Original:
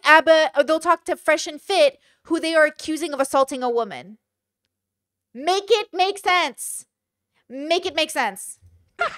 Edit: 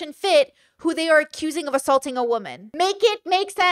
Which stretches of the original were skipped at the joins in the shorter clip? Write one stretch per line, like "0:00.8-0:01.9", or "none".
0:04.0-0:05.3